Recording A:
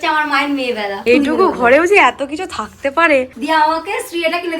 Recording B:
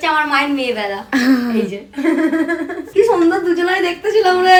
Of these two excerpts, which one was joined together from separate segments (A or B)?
A